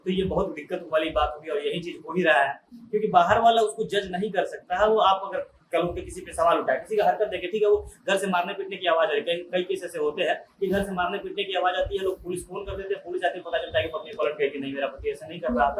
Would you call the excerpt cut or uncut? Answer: uncut